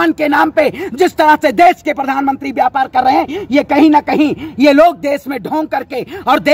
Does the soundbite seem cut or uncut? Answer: uncut